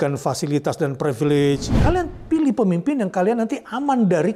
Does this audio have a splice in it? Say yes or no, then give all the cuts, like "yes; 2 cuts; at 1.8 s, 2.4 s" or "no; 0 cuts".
yes; 1 cut; at 1.7 s